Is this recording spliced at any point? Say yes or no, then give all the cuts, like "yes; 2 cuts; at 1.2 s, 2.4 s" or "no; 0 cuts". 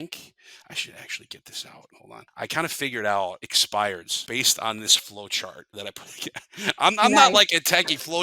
yes; 4 cuts; at 2.0 s, 3.5 s, 4.1 s, 5.6 s